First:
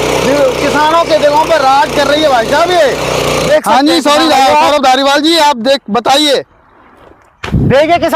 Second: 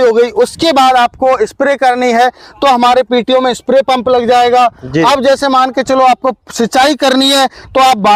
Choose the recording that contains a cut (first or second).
first